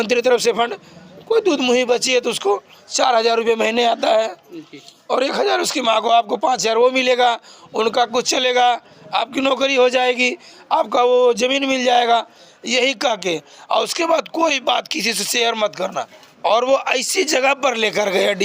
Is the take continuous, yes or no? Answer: no